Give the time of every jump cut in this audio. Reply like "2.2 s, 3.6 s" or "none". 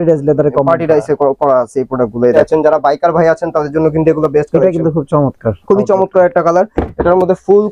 2.4 s